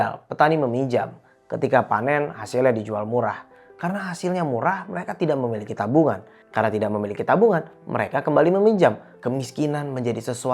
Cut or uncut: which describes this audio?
cut